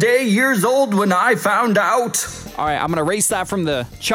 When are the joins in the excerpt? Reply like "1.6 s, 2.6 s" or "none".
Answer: 2.2 s